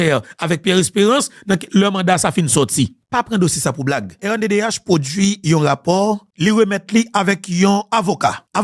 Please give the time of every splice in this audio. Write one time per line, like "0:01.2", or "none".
0:04.2